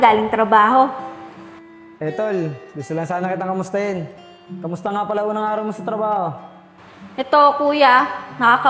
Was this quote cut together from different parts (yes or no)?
no